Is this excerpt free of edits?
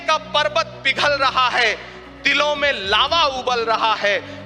yes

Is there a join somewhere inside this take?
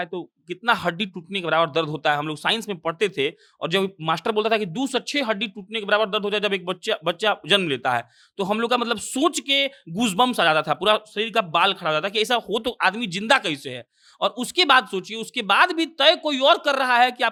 no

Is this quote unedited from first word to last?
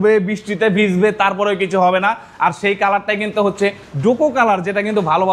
yes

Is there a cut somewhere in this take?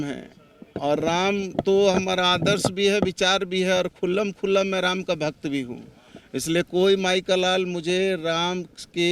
no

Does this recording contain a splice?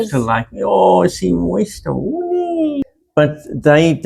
yes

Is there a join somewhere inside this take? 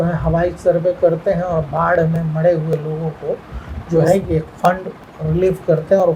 no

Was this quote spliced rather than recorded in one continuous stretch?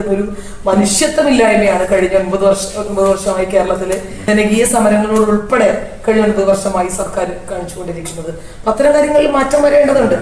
no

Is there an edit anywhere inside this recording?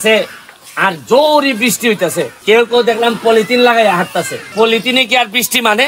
no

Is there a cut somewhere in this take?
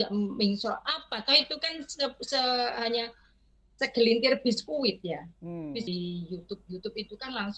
yes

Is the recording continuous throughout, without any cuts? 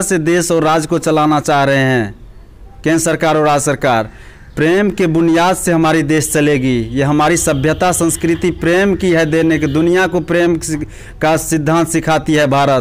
yes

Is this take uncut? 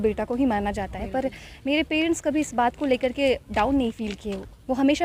yes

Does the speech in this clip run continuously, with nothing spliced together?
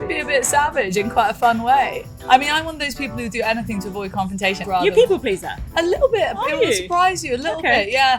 no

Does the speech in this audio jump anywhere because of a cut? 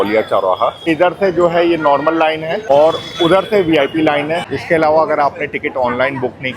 yes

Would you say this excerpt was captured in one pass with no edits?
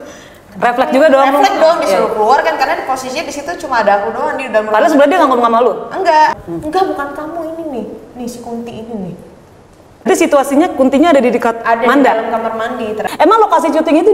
no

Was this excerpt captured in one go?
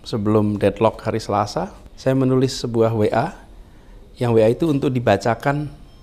no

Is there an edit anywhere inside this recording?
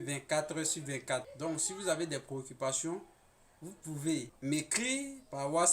yes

